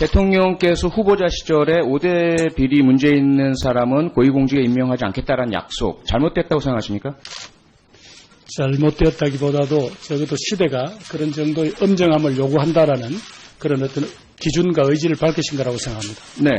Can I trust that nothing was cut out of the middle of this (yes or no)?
yes